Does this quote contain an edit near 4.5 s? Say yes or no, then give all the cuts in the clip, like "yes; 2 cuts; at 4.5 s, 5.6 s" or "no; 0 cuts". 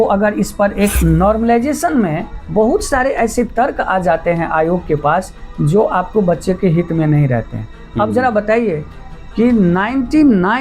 no; 1 cut; at 1.0 s